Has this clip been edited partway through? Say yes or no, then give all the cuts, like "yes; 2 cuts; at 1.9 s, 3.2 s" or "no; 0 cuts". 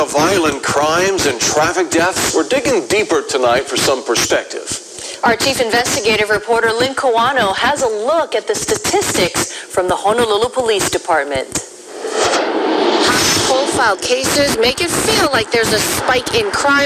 yes; 1 cut; at 2.5 s